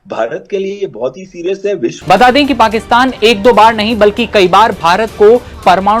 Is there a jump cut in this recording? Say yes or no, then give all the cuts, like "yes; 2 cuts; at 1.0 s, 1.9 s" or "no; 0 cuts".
yes; 1 cut; at 2.0 s